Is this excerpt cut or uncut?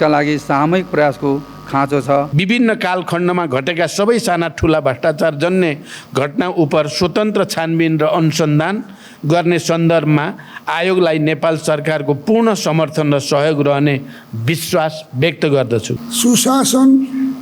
cut